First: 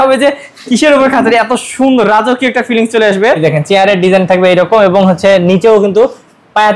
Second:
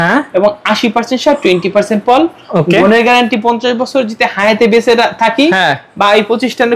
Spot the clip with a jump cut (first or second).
first